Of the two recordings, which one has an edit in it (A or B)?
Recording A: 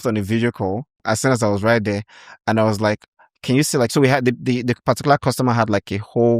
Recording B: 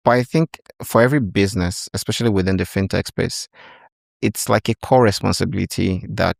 A